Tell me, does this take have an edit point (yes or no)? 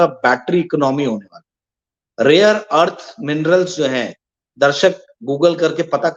no